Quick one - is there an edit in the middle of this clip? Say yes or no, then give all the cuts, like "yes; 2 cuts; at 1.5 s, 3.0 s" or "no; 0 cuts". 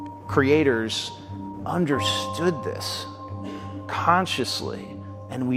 no; 0 cuts